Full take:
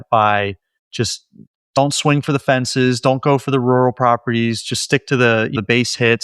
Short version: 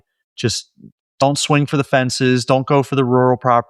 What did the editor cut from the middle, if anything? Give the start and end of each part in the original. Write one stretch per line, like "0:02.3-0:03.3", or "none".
none